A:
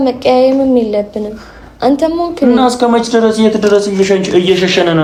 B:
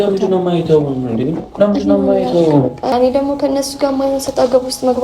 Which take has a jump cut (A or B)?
B